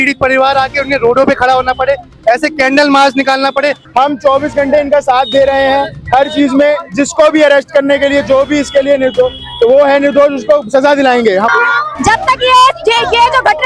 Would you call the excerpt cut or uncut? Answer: cut